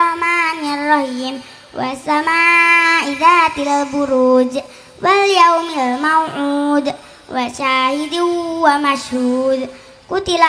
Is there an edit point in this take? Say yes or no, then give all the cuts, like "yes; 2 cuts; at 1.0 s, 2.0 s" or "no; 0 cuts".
no; 0 cuts